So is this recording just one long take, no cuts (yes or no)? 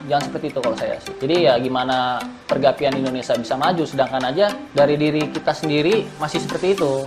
no